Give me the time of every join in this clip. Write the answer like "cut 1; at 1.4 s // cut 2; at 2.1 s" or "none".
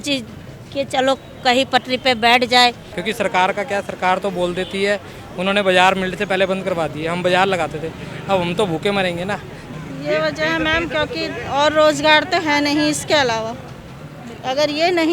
cut 1; at 2.9 s // cut 2; at 9.6 s

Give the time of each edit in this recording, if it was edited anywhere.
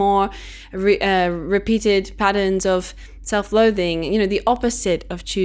none

